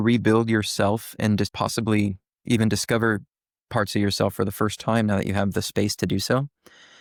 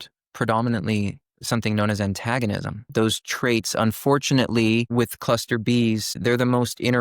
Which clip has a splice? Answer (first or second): second